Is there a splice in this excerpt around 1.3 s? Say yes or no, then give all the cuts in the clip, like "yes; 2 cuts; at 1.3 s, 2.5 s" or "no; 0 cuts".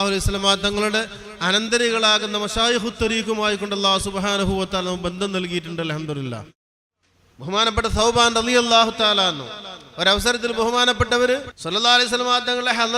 no; 2 cuts; at 6.6 s, 11.5 s